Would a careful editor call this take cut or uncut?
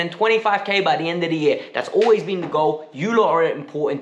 uncut